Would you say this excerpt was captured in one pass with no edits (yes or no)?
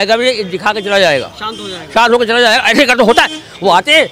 yes